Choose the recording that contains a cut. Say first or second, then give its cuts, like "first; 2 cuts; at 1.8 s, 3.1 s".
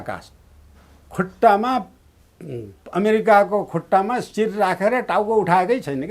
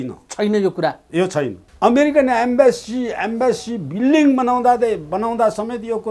second; 1 cut; at 1.6 s